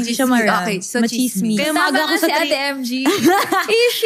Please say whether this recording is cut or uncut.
uncut